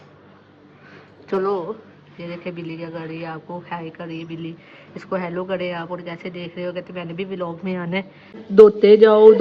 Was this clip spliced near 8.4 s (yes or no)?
yes